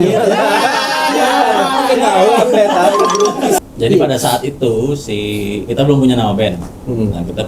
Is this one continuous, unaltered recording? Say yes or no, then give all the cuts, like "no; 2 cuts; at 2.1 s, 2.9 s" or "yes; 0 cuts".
no; 1 cut; at 3.6 s